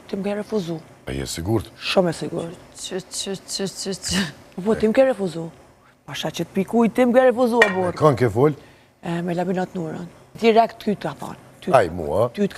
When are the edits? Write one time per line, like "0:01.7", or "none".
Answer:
0:00.9
0:10.3